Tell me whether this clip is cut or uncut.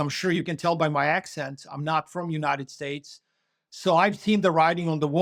uncut